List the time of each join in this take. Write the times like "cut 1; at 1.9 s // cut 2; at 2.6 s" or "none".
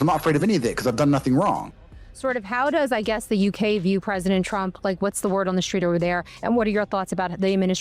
cut 1; at 1.9 s